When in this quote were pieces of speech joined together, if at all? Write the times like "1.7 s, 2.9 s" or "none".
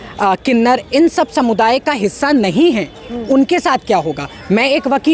none